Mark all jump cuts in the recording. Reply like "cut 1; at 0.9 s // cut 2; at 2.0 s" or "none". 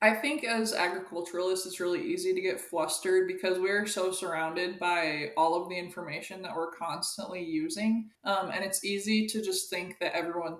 cut 1; at 8.1 s